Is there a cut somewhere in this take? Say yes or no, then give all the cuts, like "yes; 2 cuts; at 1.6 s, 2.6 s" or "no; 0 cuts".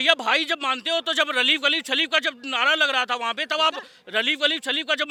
no; 0 cuts